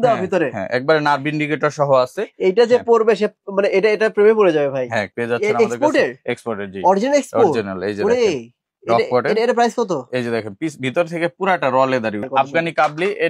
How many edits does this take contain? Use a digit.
2